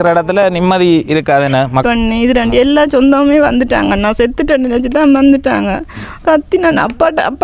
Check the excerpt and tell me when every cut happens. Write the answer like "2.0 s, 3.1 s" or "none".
1.8 s

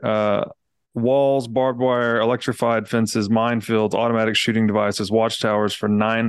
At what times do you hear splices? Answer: none

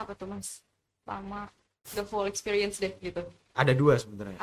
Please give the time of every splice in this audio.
none

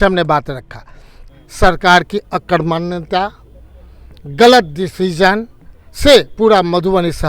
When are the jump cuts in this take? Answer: 1.2 s

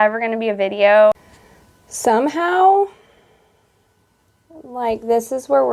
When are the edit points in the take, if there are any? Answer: 1.2 s

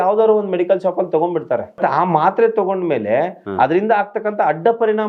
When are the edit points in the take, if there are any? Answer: 1.8 s

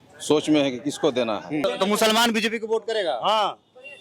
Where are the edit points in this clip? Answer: 1.6 s

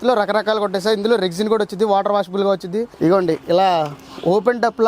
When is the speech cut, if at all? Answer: 2.9 s

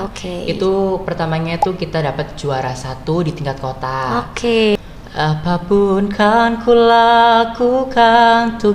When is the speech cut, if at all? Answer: 4.8 s

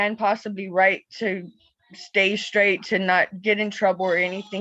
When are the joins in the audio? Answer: none

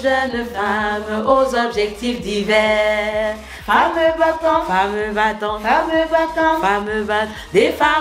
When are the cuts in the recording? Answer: none

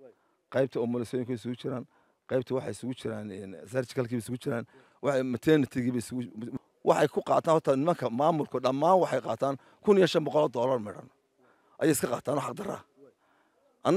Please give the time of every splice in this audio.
6.6 s

